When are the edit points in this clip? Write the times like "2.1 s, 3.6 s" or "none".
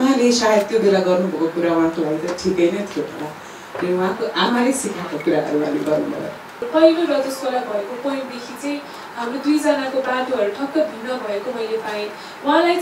6.6 s

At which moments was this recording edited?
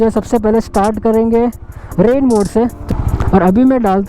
2.8 s

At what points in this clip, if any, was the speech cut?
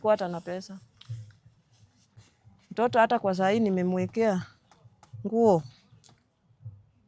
2.3 s

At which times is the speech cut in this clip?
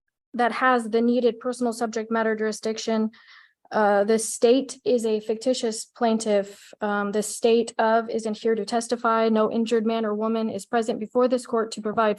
none

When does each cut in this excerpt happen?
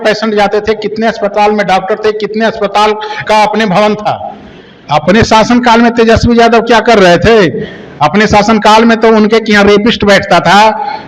4.7 s

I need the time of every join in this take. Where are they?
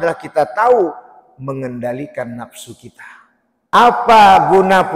3.8 s

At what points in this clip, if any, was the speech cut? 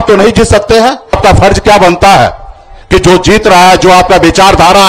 1.2 s

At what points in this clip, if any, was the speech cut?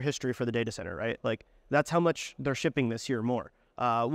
none

